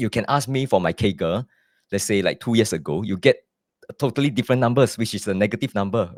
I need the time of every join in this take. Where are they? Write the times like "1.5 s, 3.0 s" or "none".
none